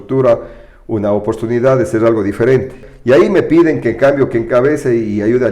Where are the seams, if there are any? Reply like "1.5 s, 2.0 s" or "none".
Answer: 2.8 s